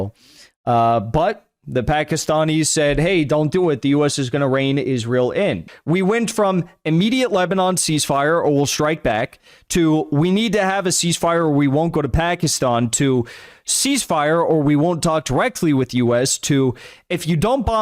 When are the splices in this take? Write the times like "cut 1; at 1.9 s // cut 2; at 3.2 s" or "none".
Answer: cut 1; at 5.7 s